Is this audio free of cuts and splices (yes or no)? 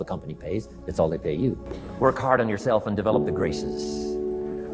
no